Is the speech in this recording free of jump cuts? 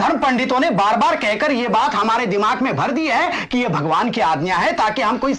yes; 0 cuts

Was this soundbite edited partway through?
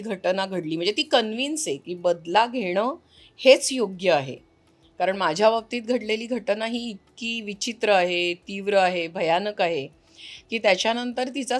no; 0 cuts

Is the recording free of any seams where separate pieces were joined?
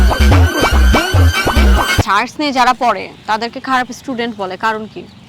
no; 1 cut; at 2.1 s

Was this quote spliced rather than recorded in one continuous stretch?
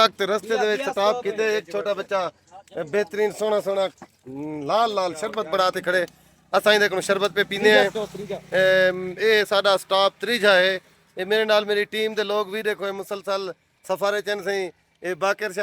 no; 0 cuts

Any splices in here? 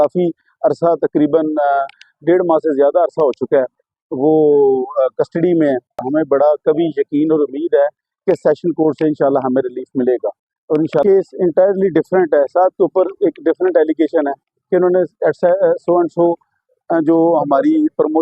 yes; 2 cuts; at 6.0 s, 11.0 s

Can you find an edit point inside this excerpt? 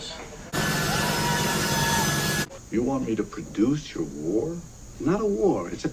no; 0 cuts

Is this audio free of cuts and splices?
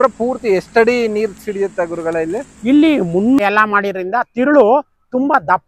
no; 1 cut; at 3.4 s

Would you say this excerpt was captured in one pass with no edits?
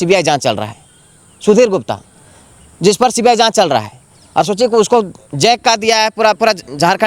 yes; 0 cuts

